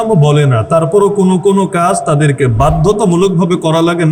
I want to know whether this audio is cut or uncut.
uncut